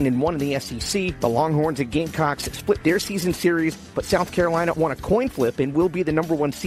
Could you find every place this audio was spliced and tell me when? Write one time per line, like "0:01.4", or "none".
none